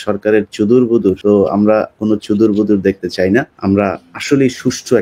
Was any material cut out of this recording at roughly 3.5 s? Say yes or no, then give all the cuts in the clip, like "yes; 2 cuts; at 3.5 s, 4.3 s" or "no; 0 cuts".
yes; 2 cuts; at 1.2 s, 3.5 s